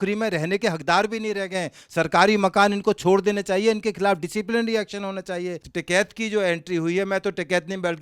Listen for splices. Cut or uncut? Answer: cut